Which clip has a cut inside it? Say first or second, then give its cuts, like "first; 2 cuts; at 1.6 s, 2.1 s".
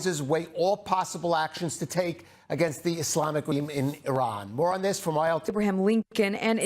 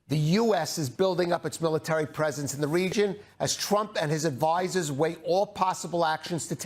first; 2 cuts; at 3.5 s, 5.5 s